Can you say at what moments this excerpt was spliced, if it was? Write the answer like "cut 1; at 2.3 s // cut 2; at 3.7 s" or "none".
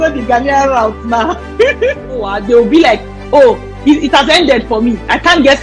cut 1; at 2.3 s